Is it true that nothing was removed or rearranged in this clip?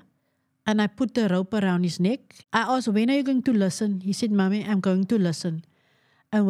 no; 1 cut; at 2.3 s

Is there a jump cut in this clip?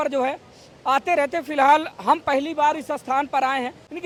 no; 0 cuts

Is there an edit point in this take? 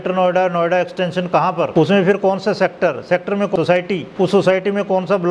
yes; 2 cuts; at 1.7 s, 3.6 s

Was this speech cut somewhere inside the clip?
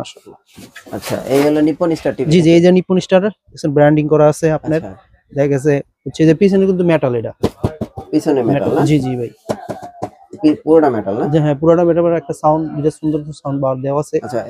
no; 0 cuts

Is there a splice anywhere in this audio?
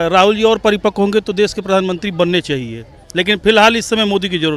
no; 0 cuts

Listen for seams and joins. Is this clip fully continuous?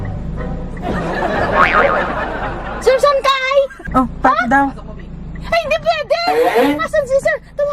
no; 2 cuts; at 3.8 s, 6.8 s

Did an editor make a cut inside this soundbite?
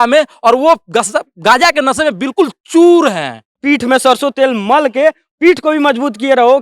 yes; 1 cut; at 3.6 s

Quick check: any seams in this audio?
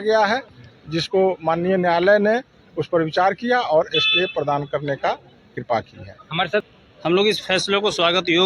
yes; 1 cut; at 6.6 s

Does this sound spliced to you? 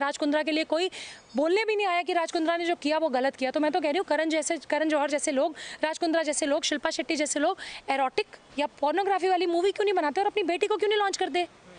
no; 0 cuts

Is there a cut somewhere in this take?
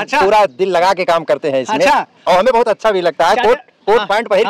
no; 0 cuts

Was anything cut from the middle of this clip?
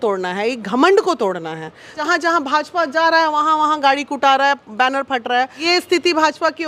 yes; 2 cuts; at 1.9 s, 5.6 s

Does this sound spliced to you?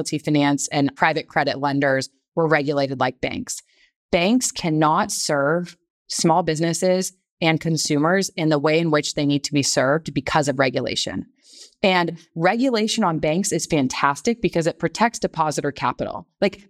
yes; 1 cut; at 0.9 s

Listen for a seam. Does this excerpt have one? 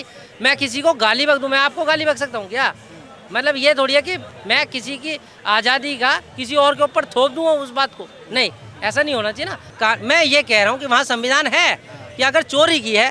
yes; 1 cut; at 9.6 s

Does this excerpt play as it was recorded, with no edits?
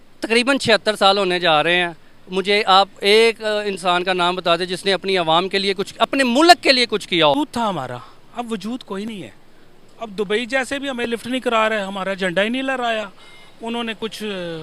no; 1 cut; at 7.4 s

